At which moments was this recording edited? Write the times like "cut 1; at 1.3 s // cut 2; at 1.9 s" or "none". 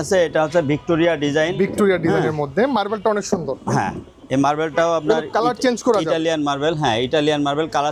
none